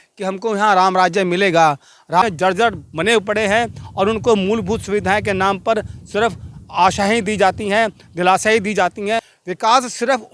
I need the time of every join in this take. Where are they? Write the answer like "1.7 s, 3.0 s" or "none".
2.2 s, 9.4 s